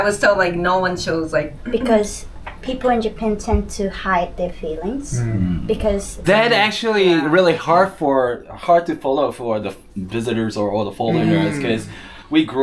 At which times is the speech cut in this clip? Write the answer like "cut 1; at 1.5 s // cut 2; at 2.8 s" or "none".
cut 1; at 1.6 s // cut 2; at 6.2 s